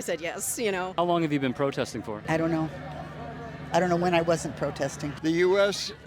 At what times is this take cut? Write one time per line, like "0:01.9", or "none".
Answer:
0:00.9
0:02.2
0:05.0